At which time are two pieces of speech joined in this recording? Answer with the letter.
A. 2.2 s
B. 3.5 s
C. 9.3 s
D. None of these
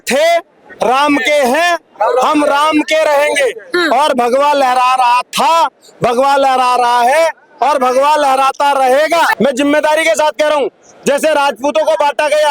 C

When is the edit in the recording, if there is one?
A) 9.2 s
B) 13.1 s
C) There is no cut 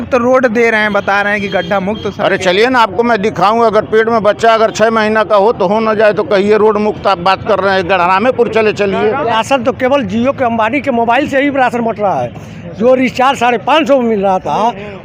A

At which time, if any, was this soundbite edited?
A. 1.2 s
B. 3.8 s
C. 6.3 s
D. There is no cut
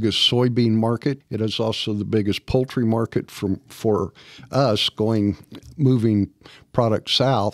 A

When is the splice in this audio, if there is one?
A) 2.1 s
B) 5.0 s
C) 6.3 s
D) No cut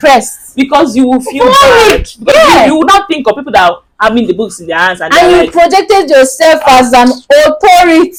D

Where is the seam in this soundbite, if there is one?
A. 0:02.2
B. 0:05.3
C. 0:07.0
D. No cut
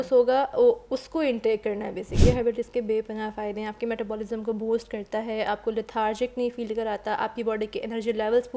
A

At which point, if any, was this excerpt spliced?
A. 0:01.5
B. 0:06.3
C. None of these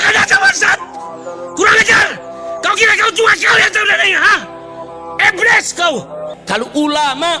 B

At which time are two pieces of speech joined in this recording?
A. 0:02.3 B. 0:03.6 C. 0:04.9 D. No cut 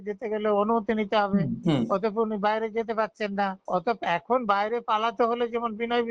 B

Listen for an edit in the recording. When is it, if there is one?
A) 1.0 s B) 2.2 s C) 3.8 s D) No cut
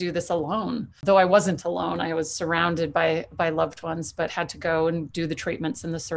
A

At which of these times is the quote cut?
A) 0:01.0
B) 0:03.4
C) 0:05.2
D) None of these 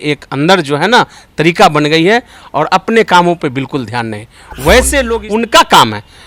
C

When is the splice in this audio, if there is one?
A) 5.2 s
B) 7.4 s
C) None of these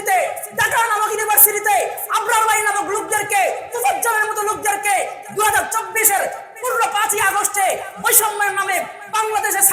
C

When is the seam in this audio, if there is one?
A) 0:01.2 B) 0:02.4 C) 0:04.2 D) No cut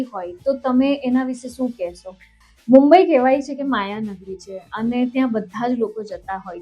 B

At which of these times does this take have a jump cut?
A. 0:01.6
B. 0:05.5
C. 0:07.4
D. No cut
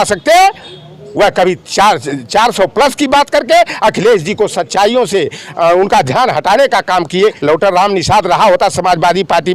C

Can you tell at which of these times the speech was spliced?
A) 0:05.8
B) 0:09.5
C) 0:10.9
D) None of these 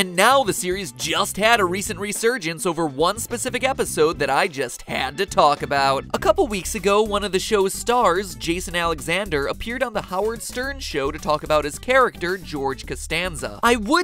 D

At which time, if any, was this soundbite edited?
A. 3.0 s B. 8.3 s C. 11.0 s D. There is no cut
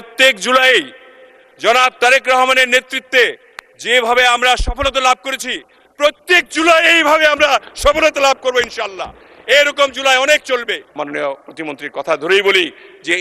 C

